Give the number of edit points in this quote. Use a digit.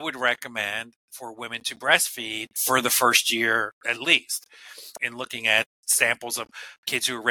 3